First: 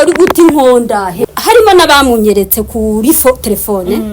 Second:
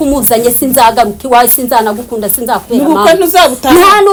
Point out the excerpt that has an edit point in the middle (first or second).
first